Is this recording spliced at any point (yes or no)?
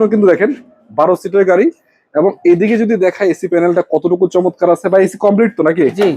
no